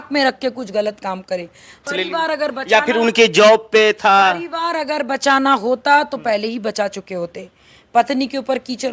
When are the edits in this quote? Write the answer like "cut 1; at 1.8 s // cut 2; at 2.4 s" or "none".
cut 1; at 1.9 s